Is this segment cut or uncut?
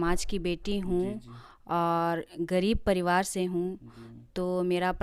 uncut